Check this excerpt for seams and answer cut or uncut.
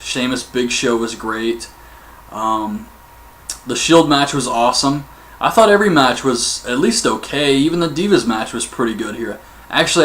cut